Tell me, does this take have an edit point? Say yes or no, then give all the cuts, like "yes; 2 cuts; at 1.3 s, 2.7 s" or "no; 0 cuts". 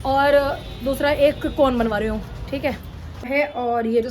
yes; 1 cut; at 3.0 s